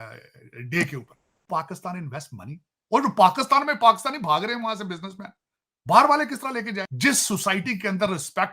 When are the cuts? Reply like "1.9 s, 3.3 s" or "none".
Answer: 1.4 s, 6.8 s